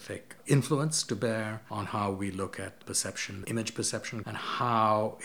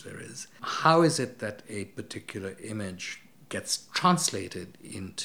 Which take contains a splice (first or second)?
first